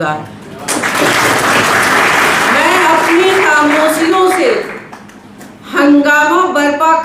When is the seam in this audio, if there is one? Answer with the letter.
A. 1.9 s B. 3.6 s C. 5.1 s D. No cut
D